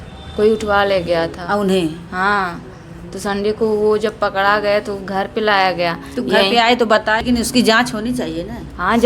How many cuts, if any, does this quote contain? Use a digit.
1